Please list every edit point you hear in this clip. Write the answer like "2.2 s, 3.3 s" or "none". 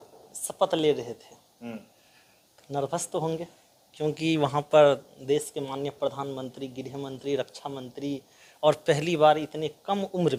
none